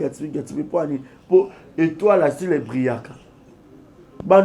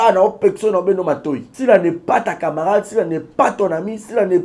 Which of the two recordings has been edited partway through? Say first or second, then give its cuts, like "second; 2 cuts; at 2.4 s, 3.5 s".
second; 1 cut; at 1.5 s